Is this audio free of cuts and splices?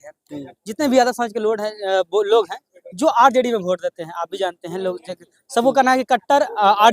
yes; 0 cuts

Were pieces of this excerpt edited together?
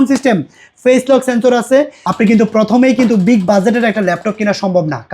yes; 1 cut; at 2.0 s

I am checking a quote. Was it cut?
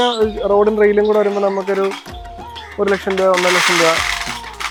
no; 0 cuts

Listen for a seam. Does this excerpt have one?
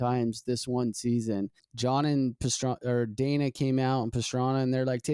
yes; 1 cut; at 1.6 s

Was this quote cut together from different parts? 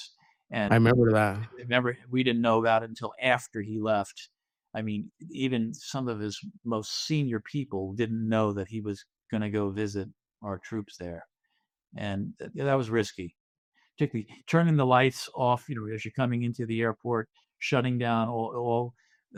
no; 0 cuts

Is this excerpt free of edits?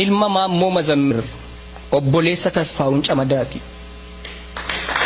no; 1 cut; at 1.1 s

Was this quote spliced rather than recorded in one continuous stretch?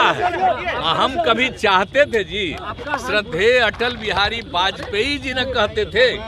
no; 0 cuts

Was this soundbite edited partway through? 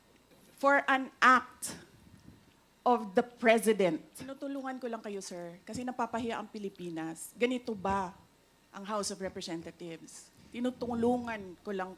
yes; 1 cut; at 4.3 s

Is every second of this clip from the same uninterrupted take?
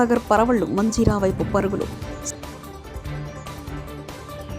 yes; 0 cuts

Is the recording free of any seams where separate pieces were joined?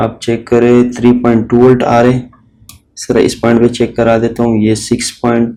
yes; 0 cuts

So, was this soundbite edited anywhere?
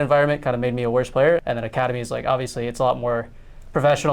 yes; 1 cut; at 1.4 s

